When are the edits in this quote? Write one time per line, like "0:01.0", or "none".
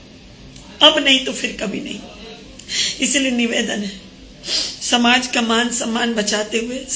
none

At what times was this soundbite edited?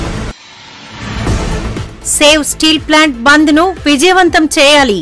0:01.5

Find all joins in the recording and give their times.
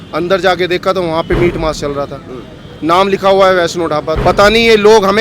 0:04.1

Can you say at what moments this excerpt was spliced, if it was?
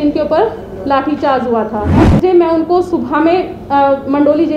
0:02.0

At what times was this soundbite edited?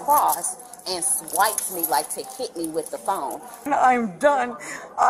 0:03.7

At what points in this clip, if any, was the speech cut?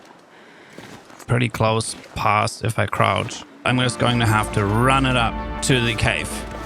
0:01.2
0:03.6
0:05.6

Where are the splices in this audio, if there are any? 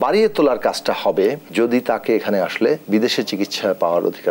0:01.4
0:02.8

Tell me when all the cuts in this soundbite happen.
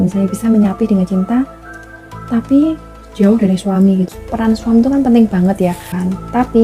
0:04.2
0:05.8

